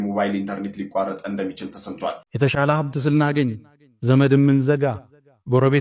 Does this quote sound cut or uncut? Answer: cut